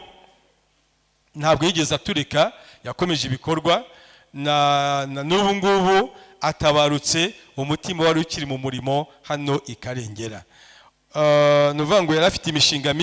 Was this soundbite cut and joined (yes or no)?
no